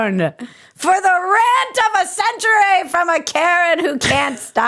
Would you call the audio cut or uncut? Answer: uncut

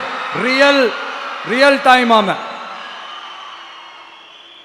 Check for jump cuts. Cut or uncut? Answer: uncut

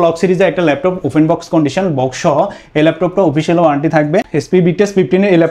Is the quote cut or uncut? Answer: cut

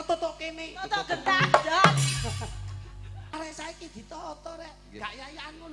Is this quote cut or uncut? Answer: cut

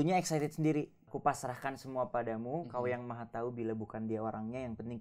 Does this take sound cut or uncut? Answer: cut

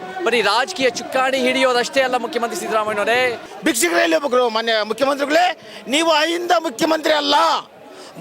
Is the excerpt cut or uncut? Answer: cut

